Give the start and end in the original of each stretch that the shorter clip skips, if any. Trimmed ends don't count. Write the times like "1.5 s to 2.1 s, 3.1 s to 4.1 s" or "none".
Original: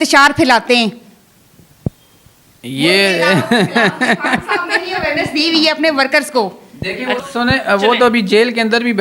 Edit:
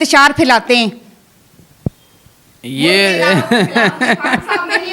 none